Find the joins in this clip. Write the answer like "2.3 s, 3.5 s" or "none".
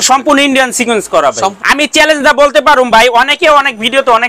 1.6 s